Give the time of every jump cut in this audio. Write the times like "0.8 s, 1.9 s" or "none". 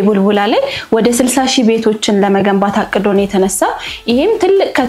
none